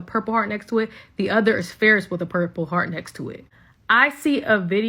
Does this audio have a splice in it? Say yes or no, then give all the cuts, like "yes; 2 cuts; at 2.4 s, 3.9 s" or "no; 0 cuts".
yes; 1 cut; at 3.5 s